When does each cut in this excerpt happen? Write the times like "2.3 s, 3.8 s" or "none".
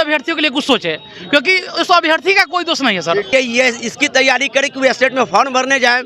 3.3 s